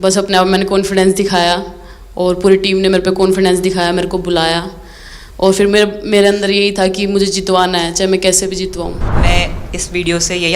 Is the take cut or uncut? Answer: uncut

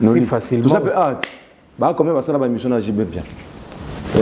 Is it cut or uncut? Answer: uncut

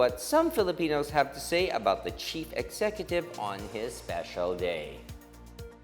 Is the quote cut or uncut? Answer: cut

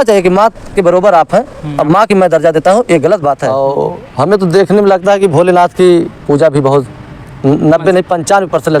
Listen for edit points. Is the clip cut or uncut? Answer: cut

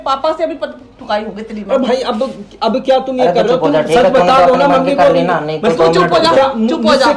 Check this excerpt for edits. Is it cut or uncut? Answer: uncut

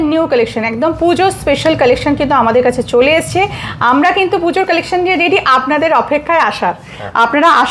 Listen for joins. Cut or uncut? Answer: uncut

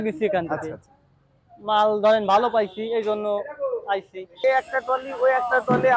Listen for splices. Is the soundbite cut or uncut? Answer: cut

